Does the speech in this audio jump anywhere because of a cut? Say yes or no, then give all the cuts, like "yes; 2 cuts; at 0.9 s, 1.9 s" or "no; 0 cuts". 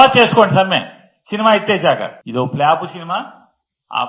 yes; 1 cut; at 2.2 s